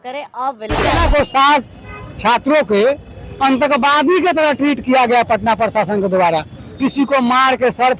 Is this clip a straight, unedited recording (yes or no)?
no